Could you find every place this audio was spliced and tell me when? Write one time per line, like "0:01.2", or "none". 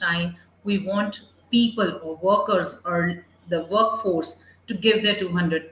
none